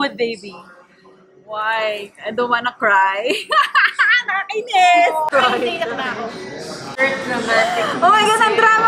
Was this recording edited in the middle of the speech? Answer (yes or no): yes